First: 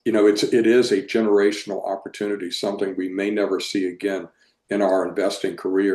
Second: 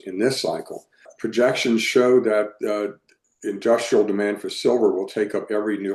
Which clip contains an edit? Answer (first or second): second